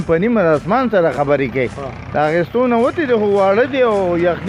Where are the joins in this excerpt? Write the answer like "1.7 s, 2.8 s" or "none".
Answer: none